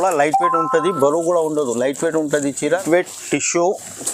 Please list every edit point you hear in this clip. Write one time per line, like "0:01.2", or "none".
0:02.8